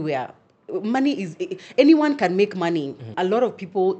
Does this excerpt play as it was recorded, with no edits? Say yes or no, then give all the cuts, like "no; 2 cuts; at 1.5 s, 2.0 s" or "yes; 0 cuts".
no; 1 cut; at 3.1 s